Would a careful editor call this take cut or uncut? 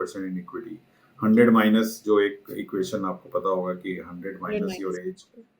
uncut